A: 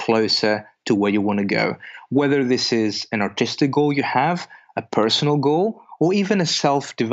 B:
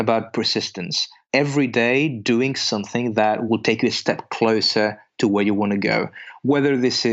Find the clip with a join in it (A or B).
B